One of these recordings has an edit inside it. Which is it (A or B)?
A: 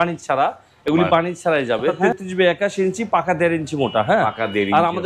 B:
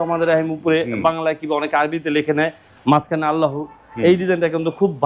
A